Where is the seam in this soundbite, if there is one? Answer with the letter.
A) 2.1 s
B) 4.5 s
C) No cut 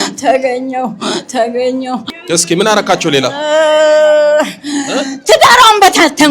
A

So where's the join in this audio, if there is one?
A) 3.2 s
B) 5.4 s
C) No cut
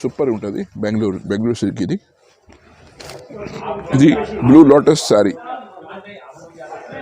A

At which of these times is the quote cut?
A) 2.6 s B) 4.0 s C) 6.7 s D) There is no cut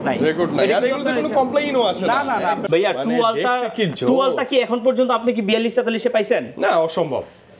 A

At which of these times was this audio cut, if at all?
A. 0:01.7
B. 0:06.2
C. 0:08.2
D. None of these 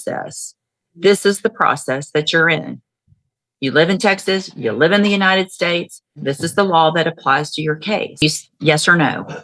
C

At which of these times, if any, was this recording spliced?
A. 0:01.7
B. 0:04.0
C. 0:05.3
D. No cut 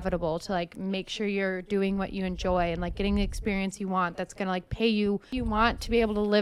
C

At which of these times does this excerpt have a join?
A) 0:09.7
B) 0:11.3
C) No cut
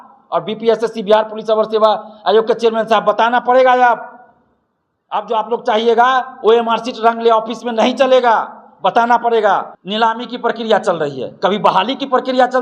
A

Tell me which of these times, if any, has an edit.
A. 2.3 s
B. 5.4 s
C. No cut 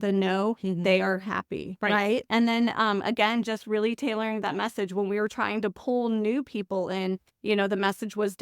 A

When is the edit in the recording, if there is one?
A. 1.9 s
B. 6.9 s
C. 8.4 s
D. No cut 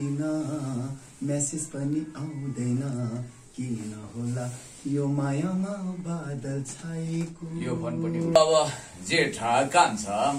C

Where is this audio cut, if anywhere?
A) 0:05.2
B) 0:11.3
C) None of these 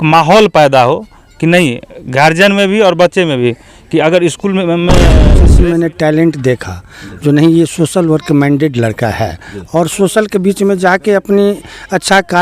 A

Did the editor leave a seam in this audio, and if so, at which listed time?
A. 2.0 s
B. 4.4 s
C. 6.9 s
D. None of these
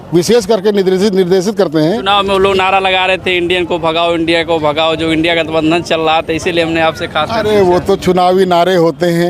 A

